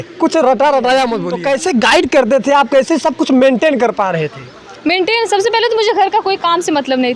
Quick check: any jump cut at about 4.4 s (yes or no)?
no